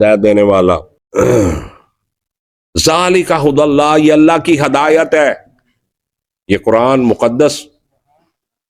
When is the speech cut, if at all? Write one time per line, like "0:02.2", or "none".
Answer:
0:01.0